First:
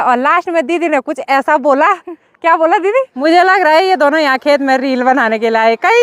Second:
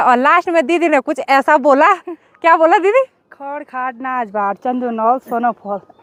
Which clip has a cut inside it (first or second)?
first